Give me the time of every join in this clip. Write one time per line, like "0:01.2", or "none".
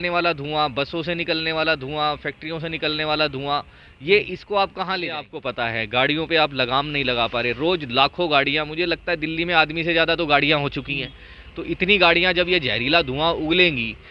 0:05.4